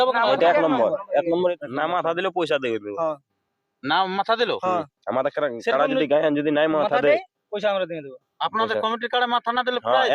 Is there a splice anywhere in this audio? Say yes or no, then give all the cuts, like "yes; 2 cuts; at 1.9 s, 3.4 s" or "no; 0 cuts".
yes; 1 cut; at 1.4 s